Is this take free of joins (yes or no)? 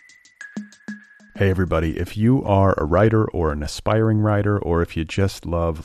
no